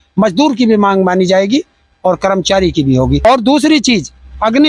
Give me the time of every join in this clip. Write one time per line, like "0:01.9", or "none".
0:03.2